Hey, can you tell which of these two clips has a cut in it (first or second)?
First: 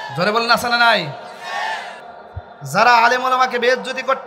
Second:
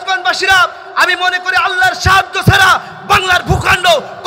first